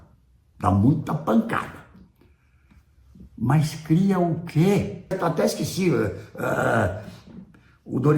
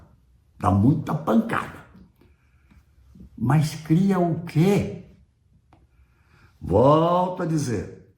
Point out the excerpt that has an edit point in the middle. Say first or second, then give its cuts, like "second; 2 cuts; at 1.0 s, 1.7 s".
first; 1 cut; at 5.1 s